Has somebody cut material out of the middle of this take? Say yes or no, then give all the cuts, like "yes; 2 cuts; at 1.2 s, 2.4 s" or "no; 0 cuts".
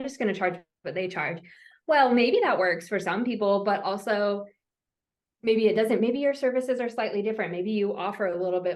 no; 0 cuts